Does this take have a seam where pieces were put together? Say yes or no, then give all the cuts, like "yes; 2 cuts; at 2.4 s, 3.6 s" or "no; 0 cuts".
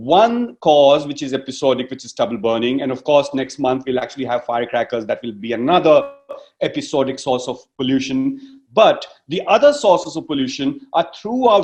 no; 0 cuts